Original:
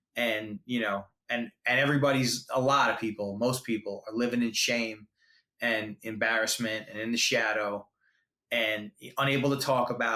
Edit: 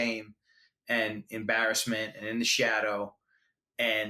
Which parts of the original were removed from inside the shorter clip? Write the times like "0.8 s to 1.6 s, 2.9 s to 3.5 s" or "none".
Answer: none